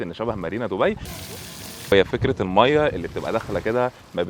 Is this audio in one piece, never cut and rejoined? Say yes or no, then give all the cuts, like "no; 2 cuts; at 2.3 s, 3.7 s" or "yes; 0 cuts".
no; 1 cut; at 1.2 s